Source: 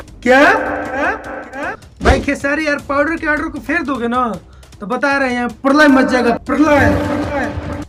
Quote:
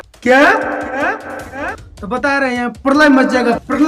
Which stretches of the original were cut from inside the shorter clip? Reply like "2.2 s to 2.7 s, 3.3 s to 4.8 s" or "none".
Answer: 1.8 s to 4.6 s